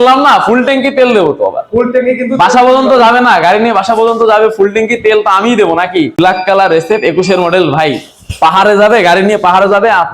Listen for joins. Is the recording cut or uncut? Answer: cut